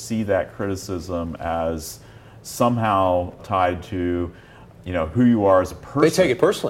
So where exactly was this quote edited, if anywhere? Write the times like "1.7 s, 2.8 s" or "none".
3.4 s, 4.7 s